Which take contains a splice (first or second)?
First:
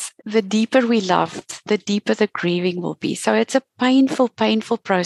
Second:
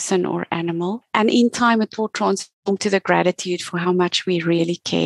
second